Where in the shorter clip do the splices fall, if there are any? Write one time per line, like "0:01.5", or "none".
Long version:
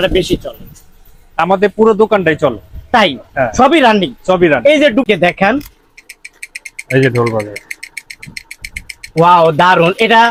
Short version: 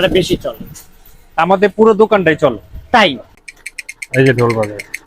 0:03.2